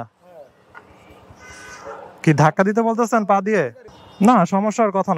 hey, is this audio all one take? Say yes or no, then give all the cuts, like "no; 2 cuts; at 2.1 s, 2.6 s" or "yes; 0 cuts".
no; 1 cut; at 4.0 s